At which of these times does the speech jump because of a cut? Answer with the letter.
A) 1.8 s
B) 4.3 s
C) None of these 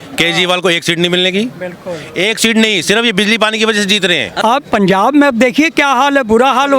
B